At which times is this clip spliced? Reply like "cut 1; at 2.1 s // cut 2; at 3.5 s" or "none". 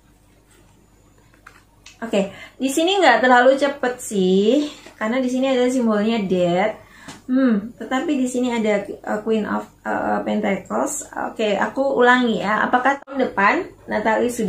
cut 1; at 13.1 s